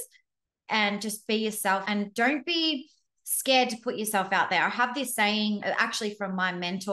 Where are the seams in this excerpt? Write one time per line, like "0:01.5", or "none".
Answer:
0:01.8
0:05.6